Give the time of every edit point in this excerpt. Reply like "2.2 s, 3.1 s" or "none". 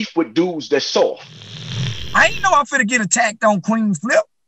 1.7 s